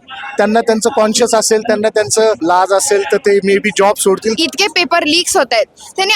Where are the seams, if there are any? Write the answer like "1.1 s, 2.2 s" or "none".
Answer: 2.4 s, 4.4 s

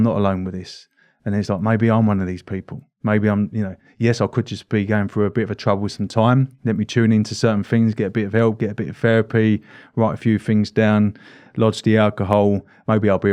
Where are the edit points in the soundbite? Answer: none

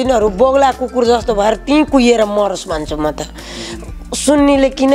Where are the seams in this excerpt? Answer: none

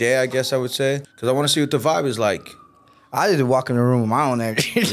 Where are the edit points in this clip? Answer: 1.1 s

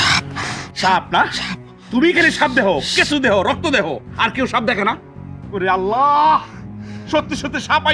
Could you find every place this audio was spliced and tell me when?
none

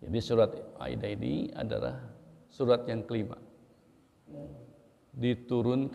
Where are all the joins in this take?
4.3 s

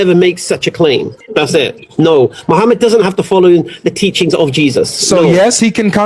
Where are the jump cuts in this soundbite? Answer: 1.2 s

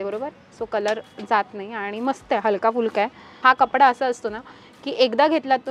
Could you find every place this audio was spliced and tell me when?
3.4 s

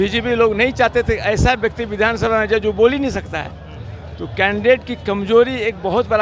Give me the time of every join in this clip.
none

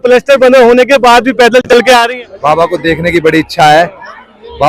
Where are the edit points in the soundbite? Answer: 2.1 s

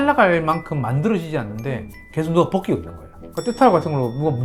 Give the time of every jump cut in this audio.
none

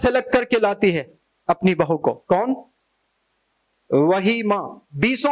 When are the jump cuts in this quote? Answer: none

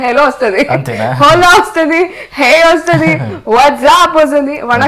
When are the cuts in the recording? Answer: none

